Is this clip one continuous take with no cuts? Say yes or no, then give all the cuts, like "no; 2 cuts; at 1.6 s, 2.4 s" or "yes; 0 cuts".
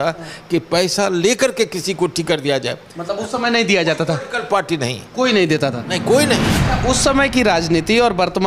no; 1 cut; at 6.5 s